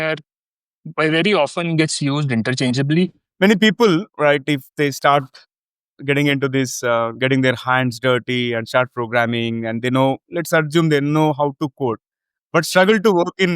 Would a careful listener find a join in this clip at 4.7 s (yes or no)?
no